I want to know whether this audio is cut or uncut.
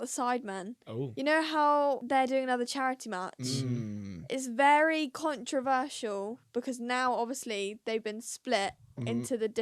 cut